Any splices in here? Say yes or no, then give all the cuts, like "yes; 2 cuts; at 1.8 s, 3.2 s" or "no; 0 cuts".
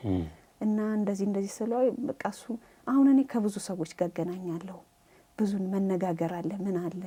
no; 0 cuts